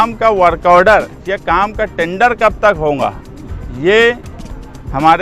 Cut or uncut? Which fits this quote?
uncut